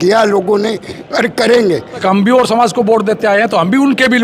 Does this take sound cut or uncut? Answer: cut